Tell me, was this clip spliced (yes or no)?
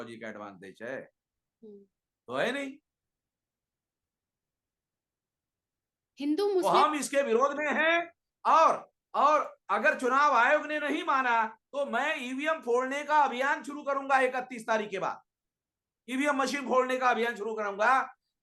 no